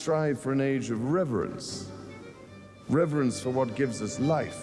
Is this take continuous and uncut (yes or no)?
yes